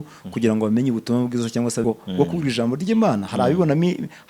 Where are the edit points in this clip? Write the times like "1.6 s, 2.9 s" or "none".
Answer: 1.8 s

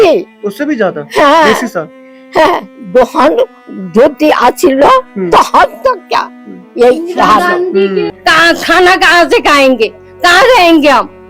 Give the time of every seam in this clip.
8.1 s

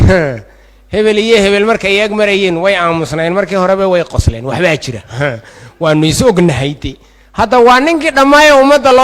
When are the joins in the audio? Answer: none

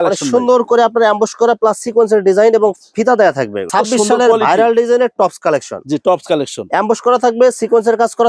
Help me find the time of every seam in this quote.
3.7 s

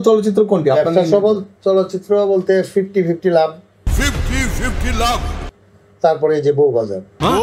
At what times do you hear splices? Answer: none

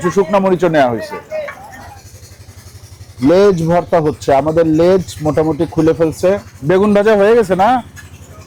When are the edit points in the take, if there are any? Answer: none

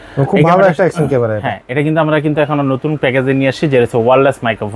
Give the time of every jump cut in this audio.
none

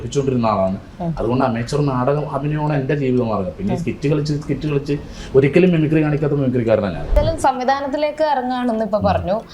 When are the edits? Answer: 7.1 s

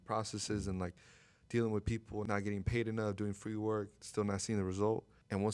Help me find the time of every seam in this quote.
none

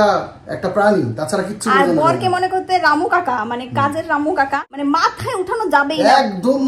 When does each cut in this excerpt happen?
4.6 s

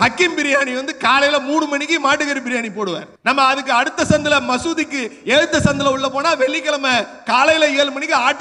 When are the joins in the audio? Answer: 3.1 s

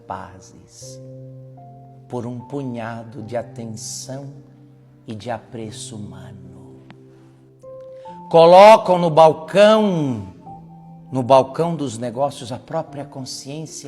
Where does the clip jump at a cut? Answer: 6.4 s, 8.3 s

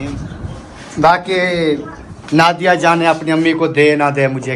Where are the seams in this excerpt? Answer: none

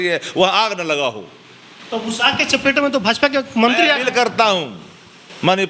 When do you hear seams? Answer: none

